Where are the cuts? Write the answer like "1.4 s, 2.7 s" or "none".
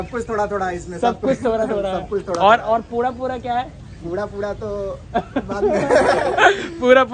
none